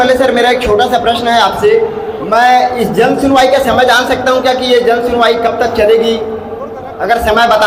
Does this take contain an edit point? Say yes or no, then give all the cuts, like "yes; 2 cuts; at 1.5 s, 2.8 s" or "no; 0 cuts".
no; 0 cuts